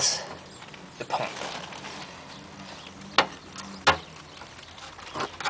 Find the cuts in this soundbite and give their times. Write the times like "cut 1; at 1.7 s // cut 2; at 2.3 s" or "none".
none